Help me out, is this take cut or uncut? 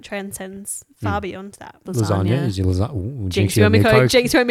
cut